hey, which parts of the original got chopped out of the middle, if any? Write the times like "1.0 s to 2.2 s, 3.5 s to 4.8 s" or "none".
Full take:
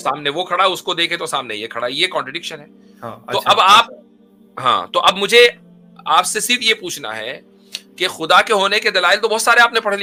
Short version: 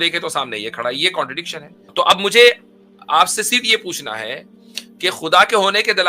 2.9 s to 4.9 s